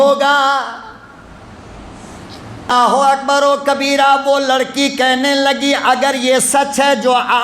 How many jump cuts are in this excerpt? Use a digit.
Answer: 1